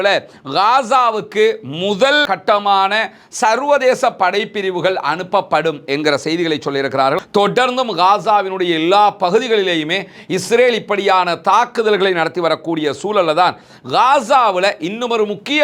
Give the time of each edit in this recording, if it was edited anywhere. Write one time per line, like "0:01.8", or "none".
0:07.2